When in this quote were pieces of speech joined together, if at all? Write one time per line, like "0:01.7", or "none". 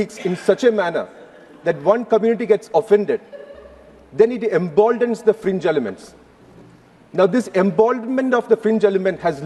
none